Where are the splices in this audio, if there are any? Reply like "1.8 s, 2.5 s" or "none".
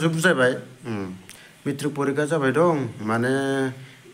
none